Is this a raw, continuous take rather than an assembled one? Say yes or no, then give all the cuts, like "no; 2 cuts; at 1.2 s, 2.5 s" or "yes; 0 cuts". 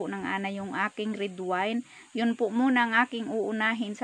yes; 0 cuts